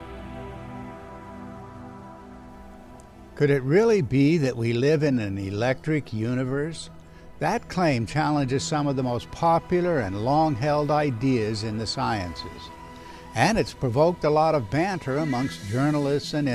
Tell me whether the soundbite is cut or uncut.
uncut